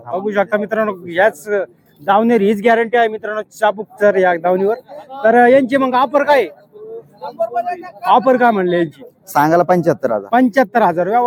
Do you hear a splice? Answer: no; 0 cuts

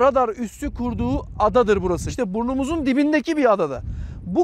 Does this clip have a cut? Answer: yes; 1 cut; at 2.1 s

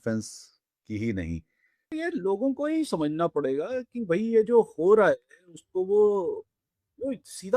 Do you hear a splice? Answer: yes; 1 cut; at 1.9 s

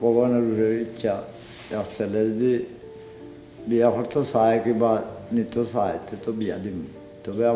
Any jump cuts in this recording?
no; 0 cuts

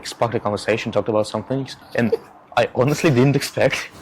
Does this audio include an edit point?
yes; 1 cut; at 1.8 s

